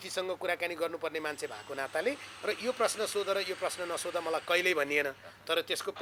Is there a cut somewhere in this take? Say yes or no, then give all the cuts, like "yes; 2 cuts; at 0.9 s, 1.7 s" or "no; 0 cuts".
no; 0 cuts